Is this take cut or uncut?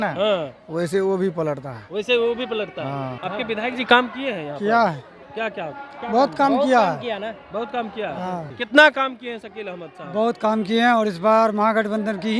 cut